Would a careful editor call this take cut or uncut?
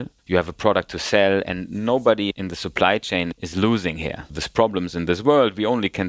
cut